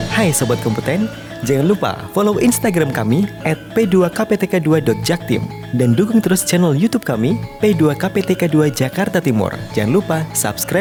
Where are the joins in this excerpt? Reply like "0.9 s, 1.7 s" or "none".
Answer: none